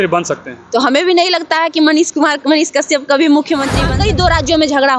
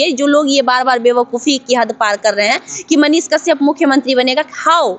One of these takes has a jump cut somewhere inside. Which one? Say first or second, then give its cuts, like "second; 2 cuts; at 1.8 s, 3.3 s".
first; 1 cut; at 3.8 s